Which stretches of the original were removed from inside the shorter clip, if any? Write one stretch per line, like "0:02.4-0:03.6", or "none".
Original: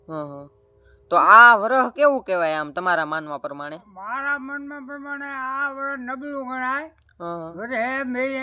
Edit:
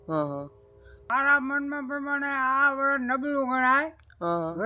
0:00.9-0:03.9